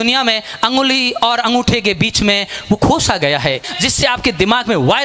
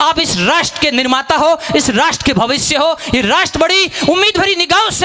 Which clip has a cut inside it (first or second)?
first